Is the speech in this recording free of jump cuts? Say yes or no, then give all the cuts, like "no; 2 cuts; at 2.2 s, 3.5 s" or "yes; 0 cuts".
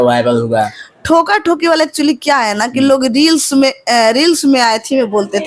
yes; 0 cuts